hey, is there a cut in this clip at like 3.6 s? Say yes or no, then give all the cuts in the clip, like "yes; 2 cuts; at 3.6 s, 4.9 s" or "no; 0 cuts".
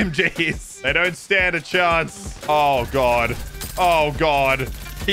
no; 1 cut; at 2.2 s